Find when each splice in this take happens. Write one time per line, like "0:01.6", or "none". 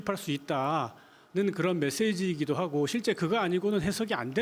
none